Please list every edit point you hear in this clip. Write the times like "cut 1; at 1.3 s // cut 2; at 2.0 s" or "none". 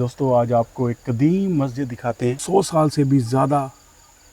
cut 1; at 2.4 s